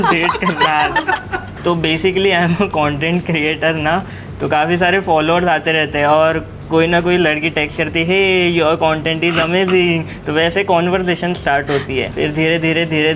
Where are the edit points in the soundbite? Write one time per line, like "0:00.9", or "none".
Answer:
0:12.1